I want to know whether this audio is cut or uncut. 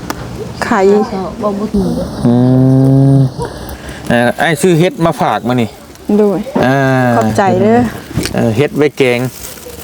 uncut